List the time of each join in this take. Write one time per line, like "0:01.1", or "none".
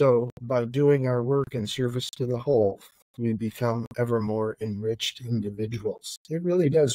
none